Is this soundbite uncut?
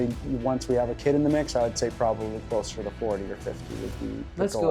yes; 0 cuts

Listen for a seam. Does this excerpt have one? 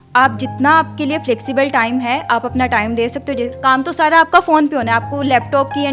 yes; 1 cut; at 3.5 s

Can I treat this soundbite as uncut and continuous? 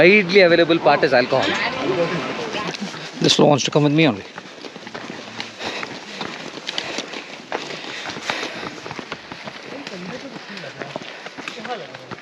no; 1 cut; at 2.4 s

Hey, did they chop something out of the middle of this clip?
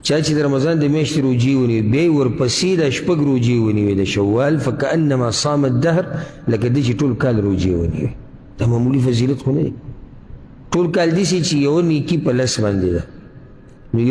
no; 0 cuts

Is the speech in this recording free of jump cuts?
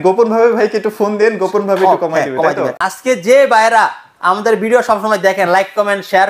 no; 1 cut; at 2.7 s

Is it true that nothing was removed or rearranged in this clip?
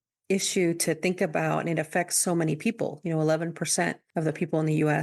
no; 1 cut; at 4.0 s

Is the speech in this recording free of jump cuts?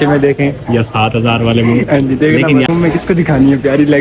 no; 1 cut; at 2.7 s

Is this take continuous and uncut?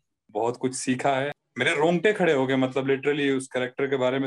no; 1 cut; at 1.4 s

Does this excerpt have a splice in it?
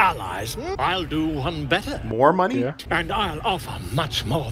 yes; 2 cuts; at 0.7 s, 2.8 s

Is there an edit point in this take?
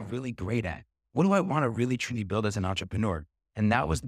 no; 0 cuts

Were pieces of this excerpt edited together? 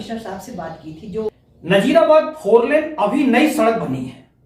yes; 1 cut; at 1.3 s

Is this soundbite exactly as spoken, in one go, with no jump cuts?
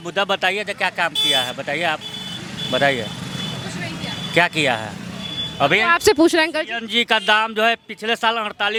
yes; 0 cuts

